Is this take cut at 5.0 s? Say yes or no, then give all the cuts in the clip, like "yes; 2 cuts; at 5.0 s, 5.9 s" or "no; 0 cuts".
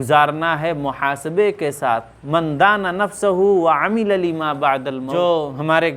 yes; 1 cut; at 5.0 s